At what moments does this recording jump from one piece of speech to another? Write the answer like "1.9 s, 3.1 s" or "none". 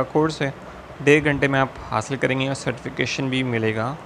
none